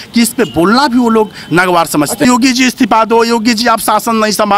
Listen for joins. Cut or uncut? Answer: cut